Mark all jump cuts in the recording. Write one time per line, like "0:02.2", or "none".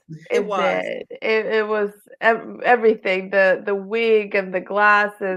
none